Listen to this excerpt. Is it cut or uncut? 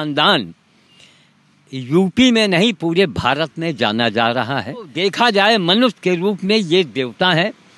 cut